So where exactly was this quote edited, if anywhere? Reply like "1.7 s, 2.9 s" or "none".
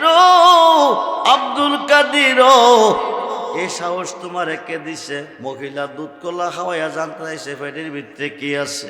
1.1 s, 3.6 s, 5.3 s